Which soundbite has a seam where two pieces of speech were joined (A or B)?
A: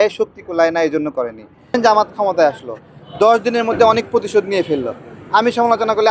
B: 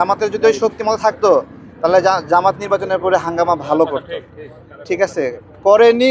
A